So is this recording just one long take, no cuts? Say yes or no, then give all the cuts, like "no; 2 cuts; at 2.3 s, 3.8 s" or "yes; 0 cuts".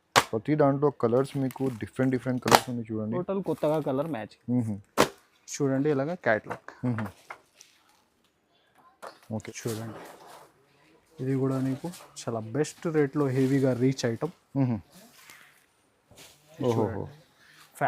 no; 1 cut; at 9.4 s